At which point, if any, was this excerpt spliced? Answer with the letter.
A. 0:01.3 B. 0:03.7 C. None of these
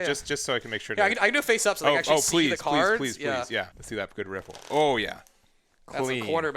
B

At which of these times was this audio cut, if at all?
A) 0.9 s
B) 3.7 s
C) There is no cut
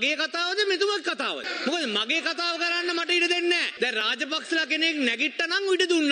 B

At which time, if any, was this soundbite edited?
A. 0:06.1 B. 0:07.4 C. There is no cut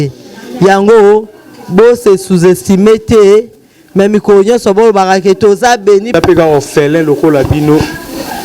A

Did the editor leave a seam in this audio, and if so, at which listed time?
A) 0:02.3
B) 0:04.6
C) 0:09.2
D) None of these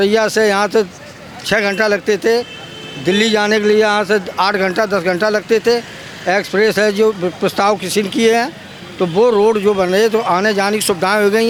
D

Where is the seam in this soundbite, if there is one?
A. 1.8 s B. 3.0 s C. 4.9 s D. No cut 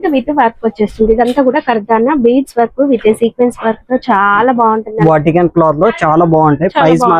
C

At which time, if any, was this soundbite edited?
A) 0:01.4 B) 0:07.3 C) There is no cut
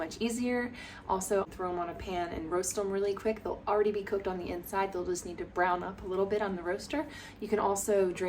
A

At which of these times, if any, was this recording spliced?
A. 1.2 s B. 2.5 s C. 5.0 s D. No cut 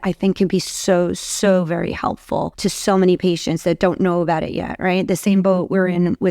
B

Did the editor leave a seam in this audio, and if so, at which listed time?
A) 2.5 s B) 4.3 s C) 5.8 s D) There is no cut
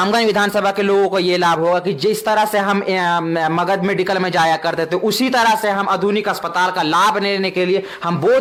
D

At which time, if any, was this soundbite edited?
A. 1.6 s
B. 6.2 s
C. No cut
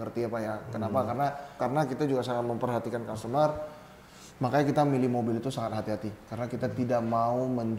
A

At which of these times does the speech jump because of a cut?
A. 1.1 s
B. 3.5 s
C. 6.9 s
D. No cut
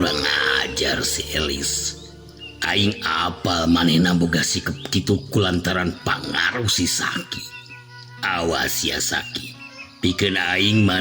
D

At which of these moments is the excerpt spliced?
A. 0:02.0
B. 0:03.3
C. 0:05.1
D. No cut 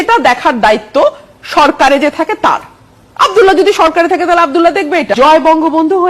C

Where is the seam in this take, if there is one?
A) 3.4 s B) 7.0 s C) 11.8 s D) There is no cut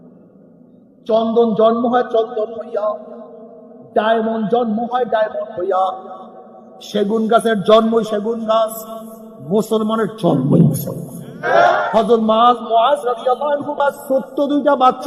C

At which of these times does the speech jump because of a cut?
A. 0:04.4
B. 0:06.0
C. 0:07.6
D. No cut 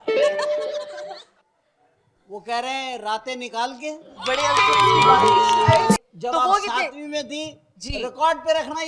B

